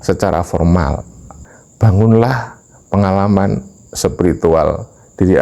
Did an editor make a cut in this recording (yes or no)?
yes